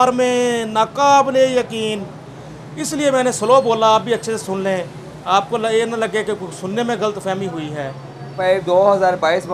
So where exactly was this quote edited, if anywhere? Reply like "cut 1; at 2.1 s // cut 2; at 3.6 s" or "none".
cut 1; at 8.3 s